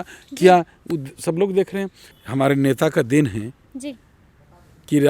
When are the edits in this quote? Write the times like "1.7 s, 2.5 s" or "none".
2.0 s